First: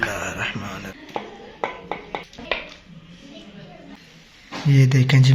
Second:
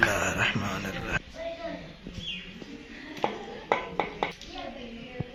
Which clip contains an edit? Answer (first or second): first